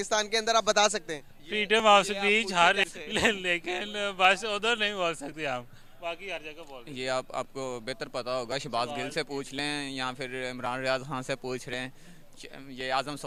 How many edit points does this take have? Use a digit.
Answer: 0